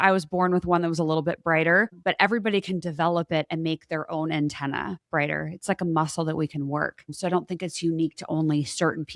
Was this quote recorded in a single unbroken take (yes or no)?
yes